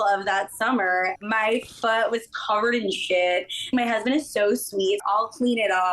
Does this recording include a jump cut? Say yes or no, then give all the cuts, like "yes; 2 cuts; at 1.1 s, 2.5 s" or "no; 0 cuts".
yes; 3 cuts; at 1.1 s, 3.7 s, 5.0 s